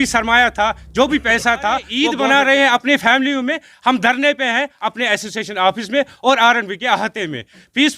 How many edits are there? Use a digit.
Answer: 1